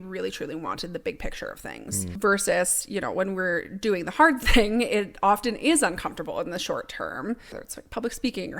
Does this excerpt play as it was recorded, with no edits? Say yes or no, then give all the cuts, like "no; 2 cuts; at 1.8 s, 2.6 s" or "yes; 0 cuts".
no; 2 cuts; at 2.2 s, 7.6 s